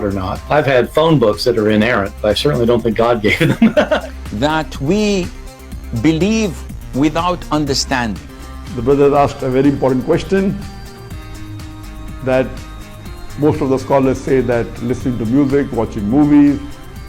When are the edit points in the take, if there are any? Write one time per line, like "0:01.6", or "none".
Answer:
0:04.0